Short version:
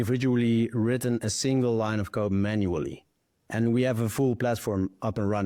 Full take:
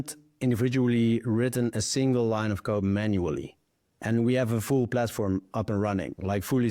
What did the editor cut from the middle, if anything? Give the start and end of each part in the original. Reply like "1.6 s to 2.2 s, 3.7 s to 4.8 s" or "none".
none